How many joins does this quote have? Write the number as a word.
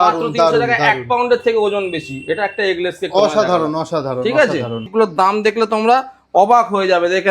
one